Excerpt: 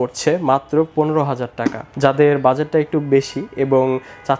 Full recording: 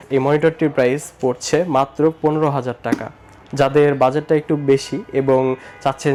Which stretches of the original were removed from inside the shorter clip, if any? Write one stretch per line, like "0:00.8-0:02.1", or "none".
0:03.1-0:03.4